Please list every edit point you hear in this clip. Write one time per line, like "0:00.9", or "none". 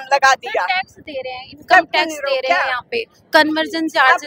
none